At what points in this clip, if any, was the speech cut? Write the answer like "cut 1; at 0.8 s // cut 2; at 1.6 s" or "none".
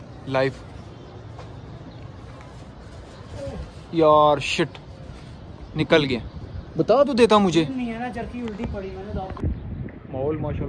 none